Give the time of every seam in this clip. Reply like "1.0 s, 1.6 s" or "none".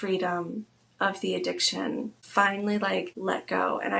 2.2 s, 3.1 s